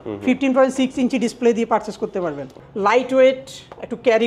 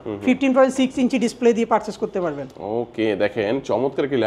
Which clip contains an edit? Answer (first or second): first